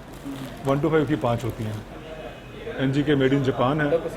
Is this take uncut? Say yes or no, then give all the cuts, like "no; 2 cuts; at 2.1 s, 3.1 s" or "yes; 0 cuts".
no; 1 cut; at 1.9 s